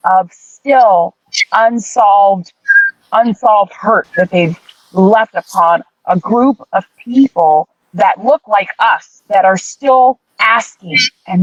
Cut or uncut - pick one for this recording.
uncut